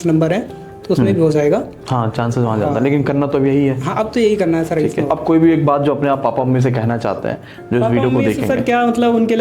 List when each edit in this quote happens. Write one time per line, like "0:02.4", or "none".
0:05.1

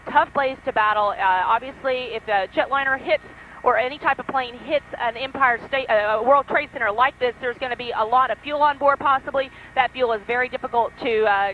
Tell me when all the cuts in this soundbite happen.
0:01.1

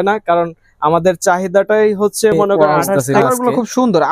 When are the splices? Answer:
0:02.8

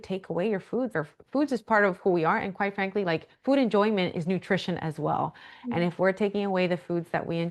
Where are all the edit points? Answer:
0:00.9

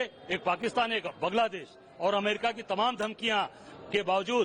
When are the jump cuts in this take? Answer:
none

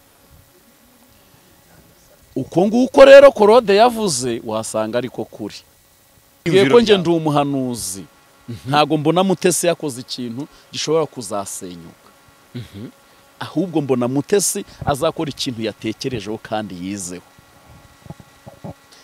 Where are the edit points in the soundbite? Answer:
0:06.5

